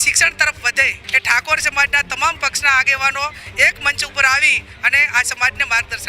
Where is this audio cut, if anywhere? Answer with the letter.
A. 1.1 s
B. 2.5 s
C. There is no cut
A